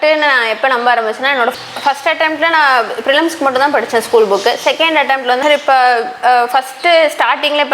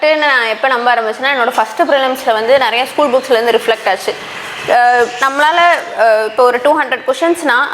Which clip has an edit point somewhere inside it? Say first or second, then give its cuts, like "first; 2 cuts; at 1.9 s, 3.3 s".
first; 2 cuts; at 1.5 s, 5.4 s